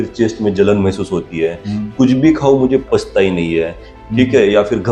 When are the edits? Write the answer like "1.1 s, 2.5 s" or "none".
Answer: 2.8 s, 3.8 s